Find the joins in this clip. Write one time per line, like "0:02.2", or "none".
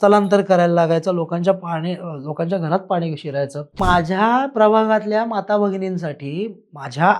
0:03.8